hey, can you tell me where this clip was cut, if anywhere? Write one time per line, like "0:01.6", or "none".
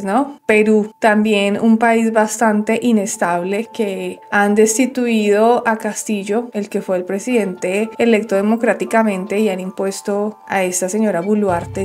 none